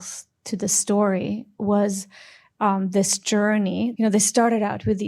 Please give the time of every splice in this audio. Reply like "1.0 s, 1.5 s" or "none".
1.5 s, 3.9 s

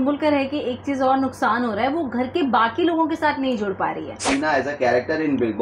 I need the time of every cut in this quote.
4.2 s

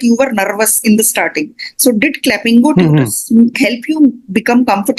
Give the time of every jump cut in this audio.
none

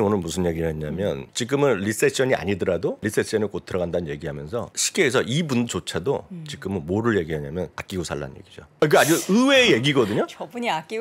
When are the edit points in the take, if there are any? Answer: 1.3 s, 3.1 s, 4.8 s, 8.2 s

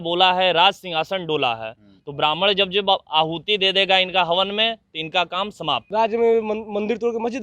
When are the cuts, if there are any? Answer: 5.8 s

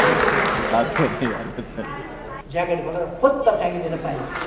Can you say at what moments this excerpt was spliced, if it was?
2.3 s

